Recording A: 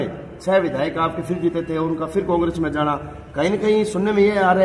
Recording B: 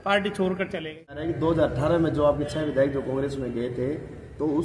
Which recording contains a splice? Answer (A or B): B